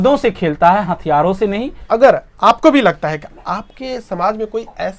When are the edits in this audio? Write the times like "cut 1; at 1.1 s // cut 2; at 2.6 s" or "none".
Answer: cut 1; at 1.8 s